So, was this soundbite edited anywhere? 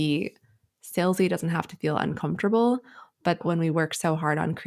yes; 1 cut; at 3.4 s

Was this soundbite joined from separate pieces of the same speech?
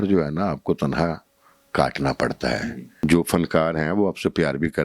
yes; 1 cut; at 2.8 s

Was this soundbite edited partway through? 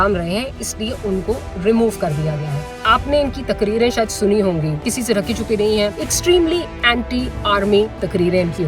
yes; 3 cuts; at 2.9 s, 4.8 s, 6.1 s

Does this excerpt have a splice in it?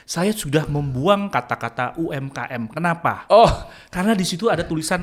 no; 0 cuts

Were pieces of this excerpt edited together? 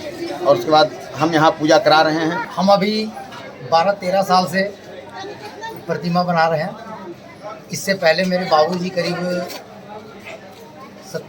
yes; 1 cut; at 2.4 s

